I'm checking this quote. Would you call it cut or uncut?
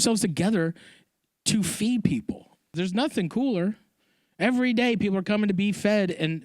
cut